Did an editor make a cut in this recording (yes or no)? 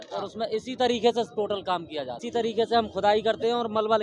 yes